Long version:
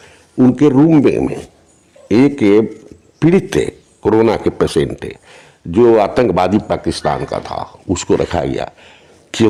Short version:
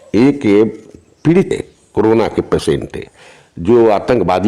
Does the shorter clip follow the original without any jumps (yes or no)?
no